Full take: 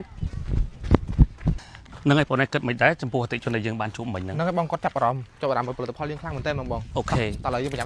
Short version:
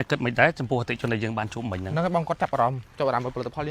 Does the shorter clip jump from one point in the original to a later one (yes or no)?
no